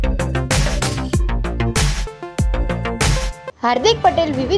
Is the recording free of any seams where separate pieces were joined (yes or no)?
no